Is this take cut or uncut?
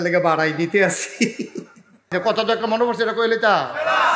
cut